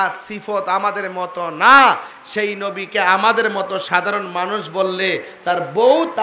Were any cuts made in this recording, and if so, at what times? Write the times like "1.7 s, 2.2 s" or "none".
none